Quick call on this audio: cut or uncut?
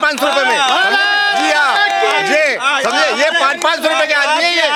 uncut